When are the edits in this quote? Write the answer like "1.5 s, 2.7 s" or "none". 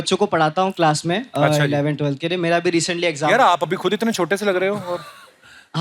none